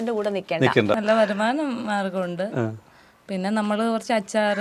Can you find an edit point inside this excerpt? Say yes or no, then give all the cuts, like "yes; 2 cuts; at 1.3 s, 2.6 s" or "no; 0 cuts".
yes; 1 cut; at 1.0 s